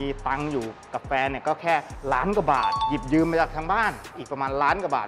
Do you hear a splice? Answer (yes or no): no